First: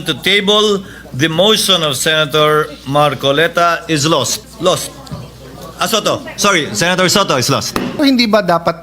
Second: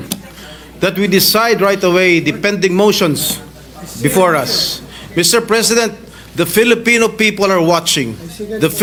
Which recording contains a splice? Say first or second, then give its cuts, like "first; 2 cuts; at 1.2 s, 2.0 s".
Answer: first; 2 cuts; at 4.4 s, 8.0 s